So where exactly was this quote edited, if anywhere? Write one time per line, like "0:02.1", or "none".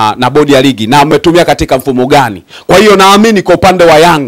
none